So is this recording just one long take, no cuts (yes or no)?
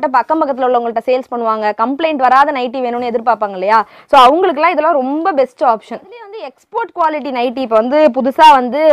no